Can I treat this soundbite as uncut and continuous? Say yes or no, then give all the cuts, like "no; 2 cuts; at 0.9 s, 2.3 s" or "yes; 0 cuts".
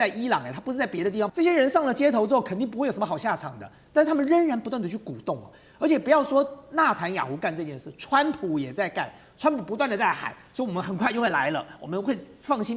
yes; 0 cuts